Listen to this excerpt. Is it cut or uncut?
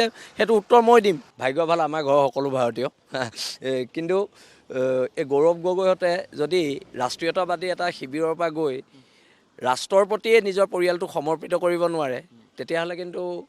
cut